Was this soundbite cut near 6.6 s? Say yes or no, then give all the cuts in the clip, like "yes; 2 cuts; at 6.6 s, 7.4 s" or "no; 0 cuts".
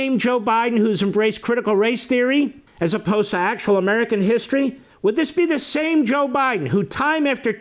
no; 2 cuts; at 2.6 s, 4.8 s